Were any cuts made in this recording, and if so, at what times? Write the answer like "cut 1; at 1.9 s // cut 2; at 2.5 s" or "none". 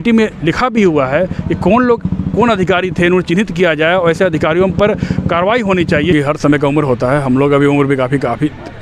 cut 1; at 6.1 s